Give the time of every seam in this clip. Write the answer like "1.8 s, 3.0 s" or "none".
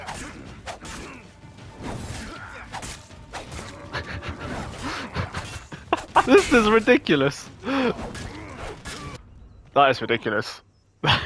6.3 s, 9.2 s